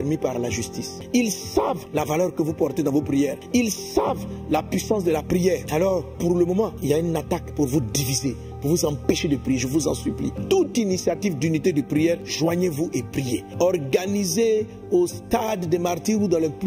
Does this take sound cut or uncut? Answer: cut